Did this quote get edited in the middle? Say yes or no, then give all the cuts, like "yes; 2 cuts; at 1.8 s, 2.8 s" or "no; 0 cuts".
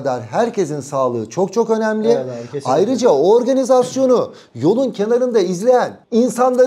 no; 0 cuts